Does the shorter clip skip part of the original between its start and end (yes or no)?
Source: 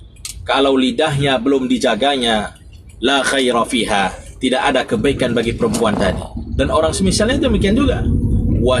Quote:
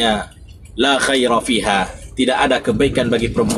no